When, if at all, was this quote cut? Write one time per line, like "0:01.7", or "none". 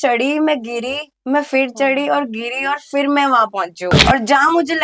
0:03.9